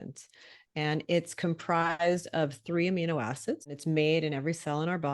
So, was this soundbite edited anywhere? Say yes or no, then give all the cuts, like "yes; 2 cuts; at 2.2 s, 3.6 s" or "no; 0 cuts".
yes; 1 cut; at 3.7 s